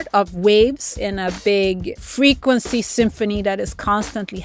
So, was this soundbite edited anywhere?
yes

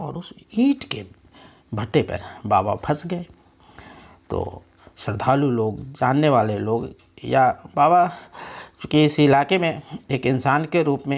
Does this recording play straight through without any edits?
yes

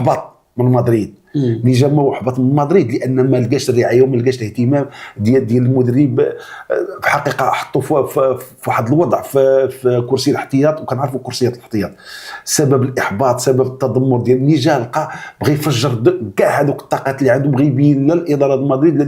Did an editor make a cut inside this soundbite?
no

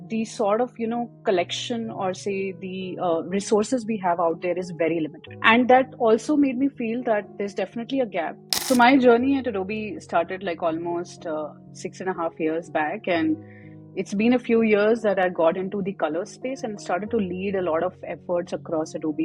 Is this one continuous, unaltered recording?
no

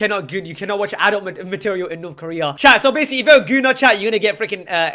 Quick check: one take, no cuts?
no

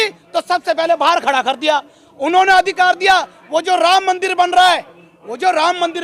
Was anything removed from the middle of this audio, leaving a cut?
no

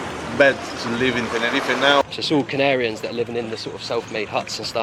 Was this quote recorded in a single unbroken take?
no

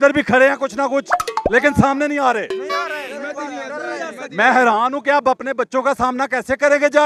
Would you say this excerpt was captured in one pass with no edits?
yes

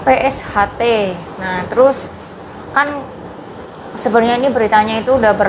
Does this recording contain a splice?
no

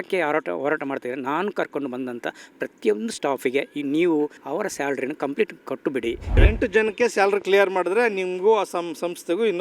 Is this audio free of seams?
no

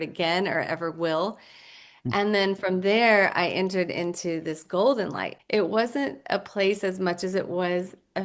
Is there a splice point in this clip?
yes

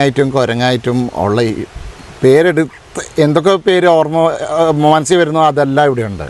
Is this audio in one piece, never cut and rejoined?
yes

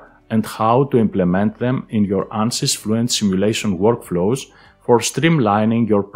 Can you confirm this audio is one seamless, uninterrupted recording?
yes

